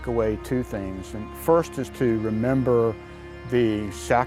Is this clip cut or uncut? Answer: uncut